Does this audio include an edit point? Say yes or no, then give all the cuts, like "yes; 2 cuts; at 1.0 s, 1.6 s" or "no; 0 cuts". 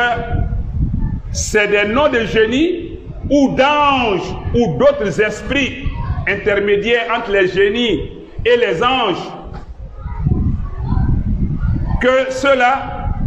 no; 0 cuts